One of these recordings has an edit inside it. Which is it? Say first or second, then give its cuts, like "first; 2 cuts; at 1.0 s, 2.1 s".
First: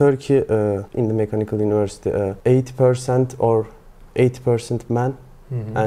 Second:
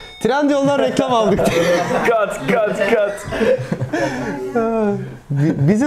first; 2 cuts; at 0.9 s, 2.4 s